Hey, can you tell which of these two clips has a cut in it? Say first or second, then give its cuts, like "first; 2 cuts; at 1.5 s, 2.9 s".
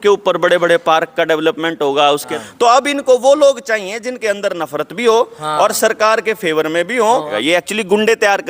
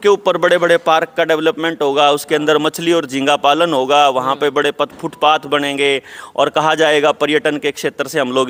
first; 2 cuts; at 2.3 s, 7.3 s